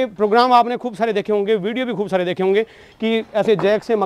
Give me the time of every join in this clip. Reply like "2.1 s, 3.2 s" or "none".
none